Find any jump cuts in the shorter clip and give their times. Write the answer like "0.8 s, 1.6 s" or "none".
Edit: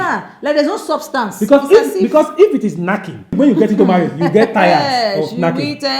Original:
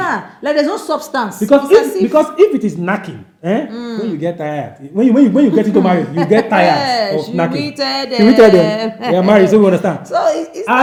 3.4 s